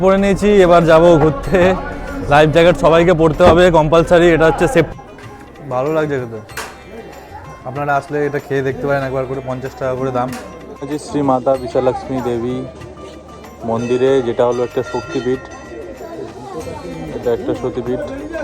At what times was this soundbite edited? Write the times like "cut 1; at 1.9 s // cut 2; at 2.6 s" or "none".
cut 1; at 4.9 s // cut 2; at 10.9 s